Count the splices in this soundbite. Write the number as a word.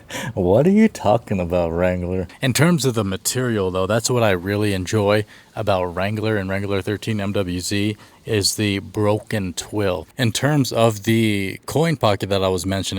two